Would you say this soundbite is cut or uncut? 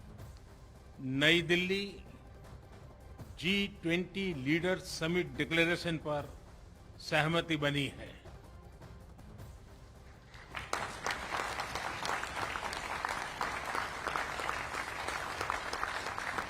cut